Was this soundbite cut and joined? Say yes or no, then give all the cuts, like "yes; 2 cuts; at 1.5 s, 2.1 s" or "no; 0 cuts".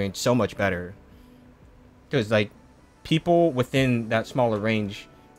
no; 0 cuts